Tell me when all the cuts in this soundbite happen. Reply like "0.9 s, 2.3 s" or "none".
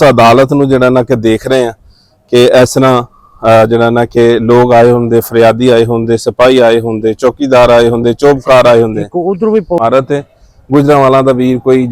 9.8 s